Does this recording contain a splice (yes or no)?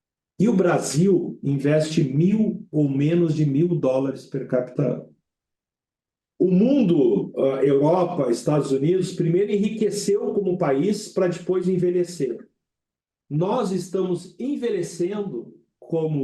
no